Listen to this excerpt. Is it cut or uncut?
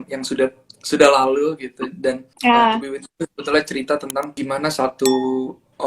cut